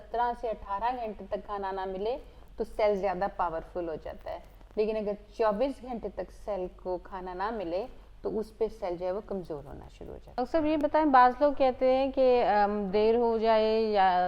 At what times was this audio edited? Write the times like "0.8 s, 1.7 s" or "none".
10.4 s